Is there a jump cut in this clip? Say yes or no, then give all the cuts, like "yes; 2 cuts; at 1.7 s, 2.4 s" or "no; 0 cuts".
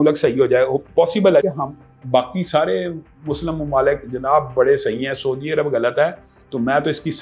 yes; 1 cut; at 1.4 s